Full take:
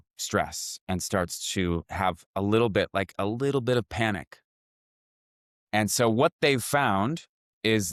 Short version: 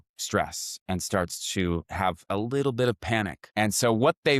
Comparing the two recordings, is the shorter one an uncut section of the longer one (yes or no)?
no